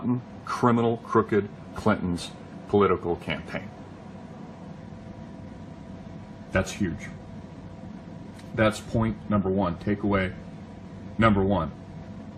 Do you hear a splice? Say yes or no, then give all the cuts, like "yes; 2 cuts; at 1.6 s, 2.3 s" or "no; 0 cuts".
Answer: yes; 1 cut; at 8.4 s